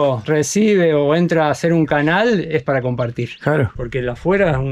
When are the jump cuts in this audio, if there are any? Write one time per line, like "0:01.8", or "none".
0:03.7